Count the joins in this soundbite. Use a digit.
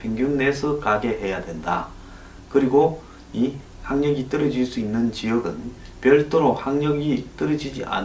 1